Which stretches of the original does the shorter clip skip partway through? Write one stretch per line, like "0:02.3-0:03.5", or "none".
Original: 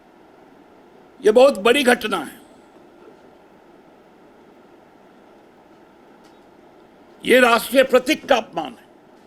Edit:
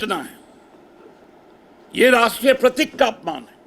0:03.3-0:06.6